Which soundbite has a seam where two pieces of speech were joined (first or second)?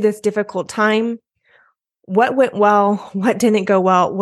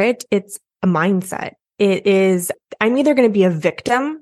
second